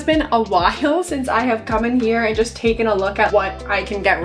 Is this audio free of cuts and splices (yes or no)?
no